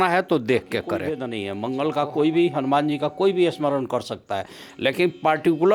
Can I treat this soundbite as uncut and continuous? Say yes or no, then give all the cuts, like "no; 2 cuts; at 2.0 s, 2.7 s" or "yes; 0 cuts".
no; 1 cut; at 1.1 s